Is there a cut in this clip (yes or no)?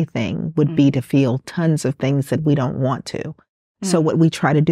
no